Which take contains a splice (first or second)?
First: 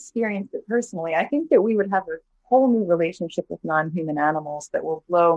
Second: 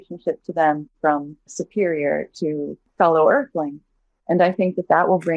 second